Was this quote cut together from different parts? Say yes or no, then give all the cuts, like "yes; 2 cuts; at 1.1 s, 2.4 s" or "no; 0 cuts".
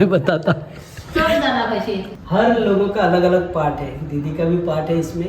yes; 1 cut; at 2.1 s